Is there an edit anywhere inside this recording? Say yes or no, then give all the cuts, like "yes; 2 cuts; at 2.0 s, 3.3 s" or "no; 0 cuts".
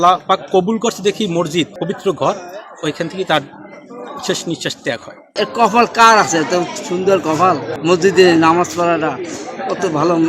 yes; 3 cuts; at 1.8 s, 5.2 s, 7.7 s